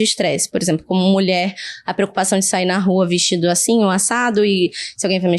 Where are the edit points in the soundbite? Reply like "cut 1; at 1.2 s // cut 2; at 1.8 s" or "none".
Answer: none